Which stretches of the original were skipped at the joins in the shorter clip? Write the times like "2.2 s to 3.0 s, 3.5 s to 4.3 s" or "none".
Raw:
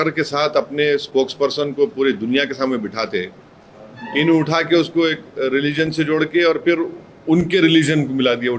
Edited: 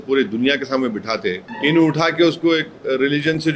3.4 s to 4.0 s